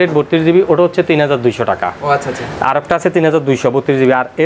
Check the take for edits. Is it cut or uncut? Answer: uncut